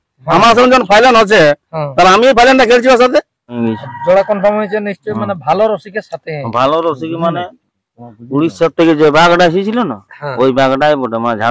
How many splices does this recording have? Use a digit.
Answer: 1